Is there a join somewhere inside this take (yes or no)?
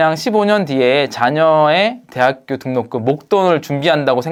no